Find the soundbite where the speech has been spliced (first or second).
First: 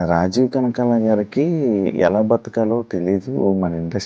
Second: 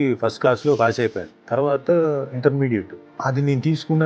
second